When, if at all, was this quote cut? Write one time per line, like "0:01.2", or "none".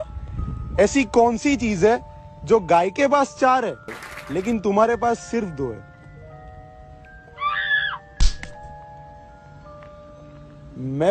none

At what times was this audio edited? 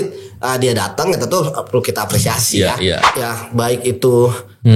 0:03.0

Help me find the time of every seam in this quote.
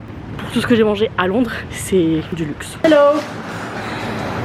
0:01.7
0:02.8

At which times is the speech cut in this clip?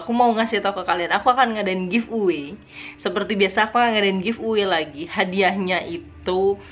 0:02.8

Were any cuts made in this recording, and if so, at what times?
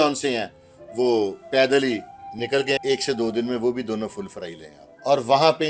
0:02.8
0:04.7

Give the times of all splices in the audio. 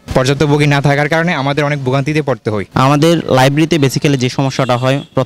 0:02.6

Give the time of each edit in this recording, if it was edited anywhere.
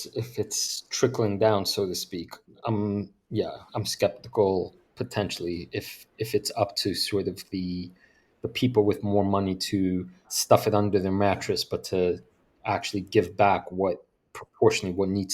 0:10.3

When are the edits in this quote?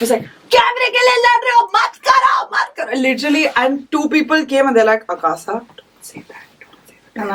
none

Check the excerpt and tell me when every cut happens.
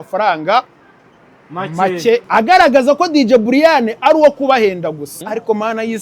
0:02.2
0:05.1

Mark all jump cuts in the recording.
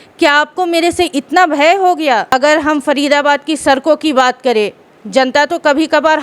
0:02.3

